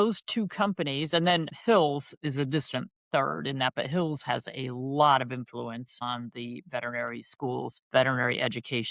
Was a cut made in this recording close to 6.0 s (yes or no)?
yes